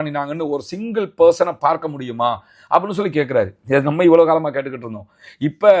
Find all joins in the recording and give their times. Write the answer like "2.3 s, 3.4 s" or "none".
none